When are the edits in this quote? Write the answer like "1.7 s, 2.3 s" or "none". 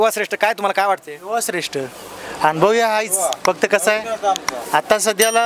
none

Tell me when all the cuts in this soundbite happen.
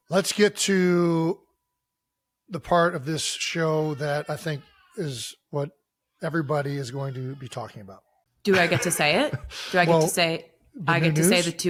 none

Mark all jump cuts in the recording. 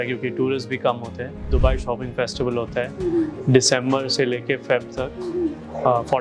1.5 s

